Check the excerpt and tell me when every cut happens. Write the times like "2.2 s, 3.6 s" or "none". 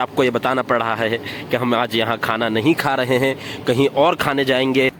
none